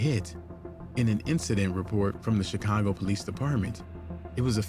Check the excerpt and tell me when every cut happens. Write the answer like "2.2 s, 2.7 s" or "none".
none